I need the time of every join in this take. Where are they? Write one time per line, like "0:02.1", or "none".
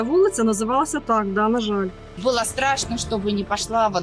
0:02.2